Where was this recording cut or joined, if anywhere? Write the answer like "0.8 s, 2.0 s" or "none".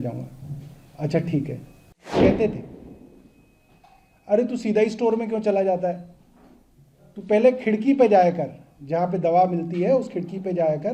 2.1 s